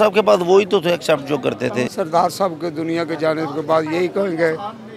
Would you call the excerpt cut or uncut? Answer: cut